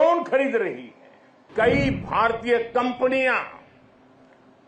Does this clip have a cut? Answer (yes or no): yes